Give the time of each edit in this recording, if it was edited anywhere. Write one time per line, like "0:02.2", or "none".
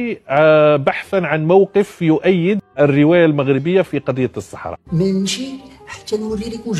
0:04.8